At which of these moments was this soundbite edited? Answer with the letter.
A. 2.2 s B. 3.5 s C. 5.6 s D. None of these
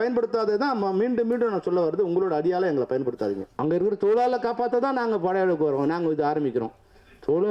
B